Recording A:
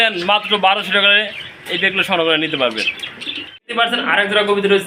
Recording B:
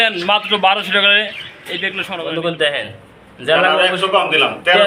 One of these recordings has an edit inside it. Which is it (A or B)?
B